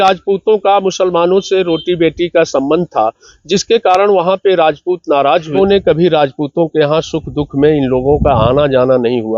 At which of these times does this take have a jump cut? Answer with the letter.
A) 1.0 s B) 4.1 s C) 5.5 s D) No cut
C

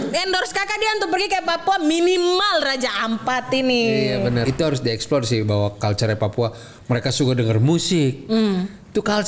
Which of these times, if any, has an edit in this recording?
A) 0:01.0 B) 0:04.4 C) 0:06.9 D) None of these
B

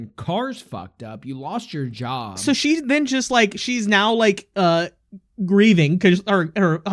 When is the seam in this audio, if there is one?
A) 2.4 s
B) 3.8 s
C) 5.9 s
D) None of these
A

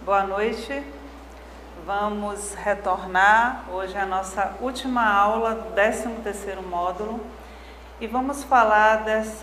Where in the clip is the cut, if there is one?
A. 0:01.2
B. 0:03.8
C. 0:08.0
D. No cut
D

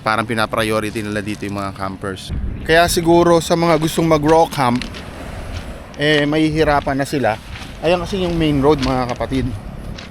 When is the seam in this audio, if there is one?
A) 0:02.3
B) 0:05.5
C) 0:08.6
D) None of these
A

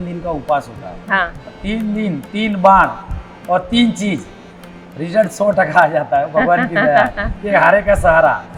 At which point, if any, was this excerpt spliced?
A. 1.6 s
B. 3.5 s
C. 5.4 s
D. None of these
A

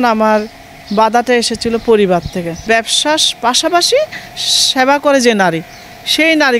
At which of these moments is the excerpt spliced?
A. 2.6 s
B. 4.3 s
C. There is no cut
A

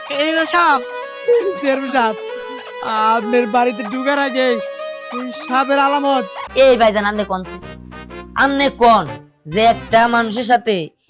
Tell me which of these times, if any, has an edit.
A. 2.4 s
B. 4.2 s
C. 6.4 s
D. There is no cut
C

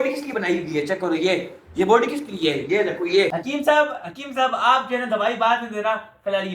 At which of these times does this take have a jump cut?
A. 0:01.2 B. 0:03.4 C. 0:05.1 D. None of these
B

